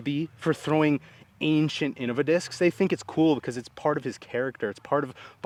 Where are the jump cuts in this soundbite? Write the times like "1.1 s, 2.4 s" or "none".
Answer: none